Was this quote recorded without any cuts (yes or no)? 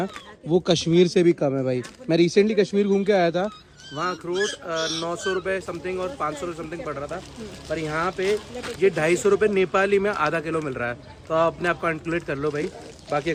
yes